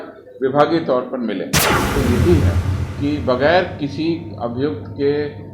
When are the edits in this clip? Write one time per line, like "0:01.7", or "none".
0:01.9